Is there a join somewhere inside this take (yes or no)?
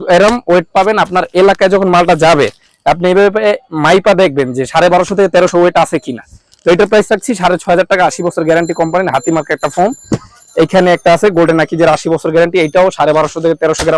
no